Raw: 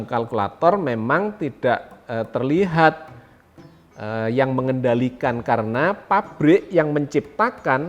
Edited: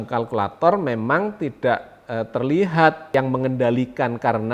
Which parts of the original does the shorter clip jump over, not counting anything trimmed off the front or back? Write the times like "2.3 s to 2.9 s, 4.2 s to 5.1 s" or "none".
3.1 s to 4.3 s